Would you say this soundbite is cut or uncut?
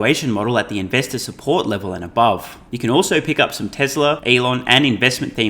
cut